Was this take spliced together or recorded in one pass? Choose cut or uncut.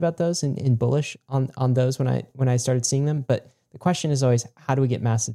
uncut